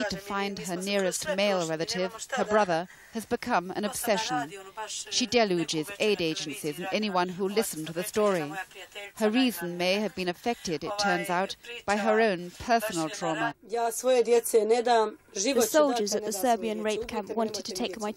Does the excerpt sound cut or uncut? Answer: cut